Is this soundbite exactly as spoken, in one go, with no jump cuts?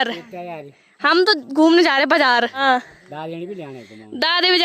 no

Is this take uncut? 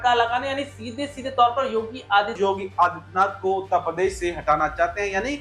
no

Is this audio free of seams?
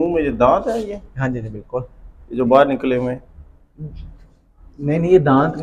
yes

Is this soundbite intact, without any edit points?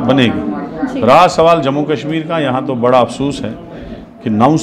yes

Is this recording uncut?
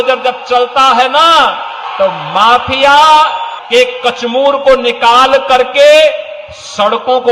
no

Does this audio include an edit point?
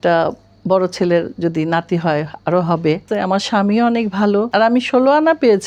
yes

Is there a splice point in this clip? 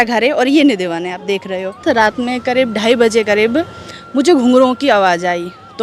yes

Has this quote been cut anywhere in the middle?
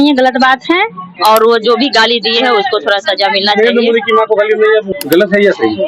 yes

